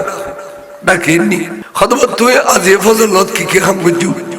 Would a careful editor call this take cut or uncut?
cut